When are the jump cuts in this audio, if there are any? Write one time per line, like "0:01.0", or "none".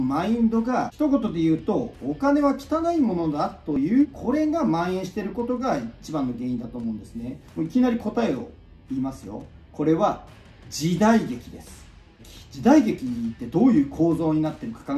0:00.9
0:03.8
0:07.4
0:09.5
0:12.2